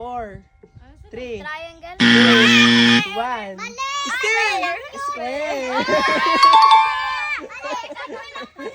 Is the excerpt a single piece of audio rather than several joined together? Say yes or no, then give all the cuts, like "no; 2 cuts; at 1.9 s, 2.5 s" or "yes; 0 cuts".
yes; 0 cuts